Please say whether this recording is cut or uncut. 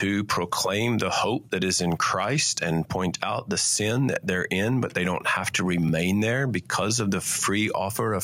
uncut